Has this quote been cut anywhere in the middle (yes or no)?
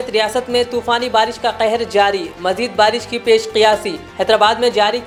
no